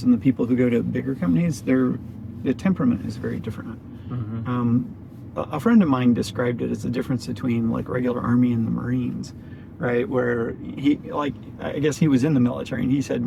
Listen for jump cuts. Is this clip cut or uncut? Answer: uncut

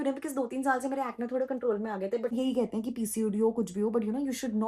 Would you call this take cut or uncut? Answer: cut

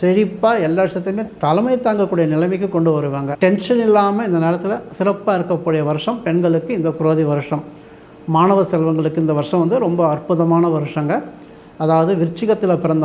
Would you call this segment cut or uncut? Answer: cut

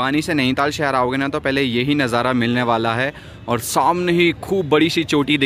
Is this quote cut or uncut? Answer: uncut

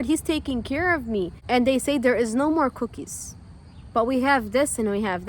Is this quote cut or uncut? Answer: cut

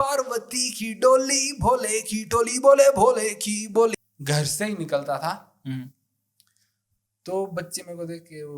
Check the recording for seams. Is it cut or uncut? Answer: cut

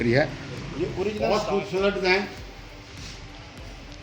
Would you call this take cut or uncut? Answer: cut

